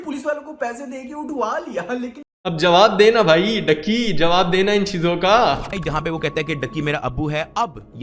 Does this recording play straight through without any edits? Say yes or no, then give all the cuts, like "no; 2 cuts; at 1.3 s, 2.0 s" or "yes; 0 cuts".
no; 1 cut; at 5.8 s